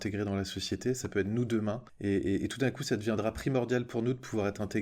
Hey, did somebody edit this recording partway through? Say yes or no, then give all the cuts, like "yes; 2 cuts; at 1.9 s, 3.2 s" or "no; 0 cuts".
yes; 1 cut; at 1.9 s